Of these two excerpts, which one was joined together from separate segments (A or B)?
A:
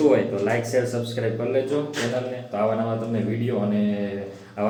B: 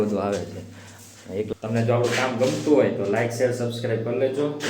B